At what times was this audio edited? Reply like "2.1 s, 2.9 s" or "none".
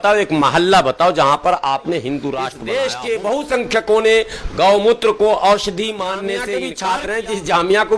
2.5 s, 6.6 s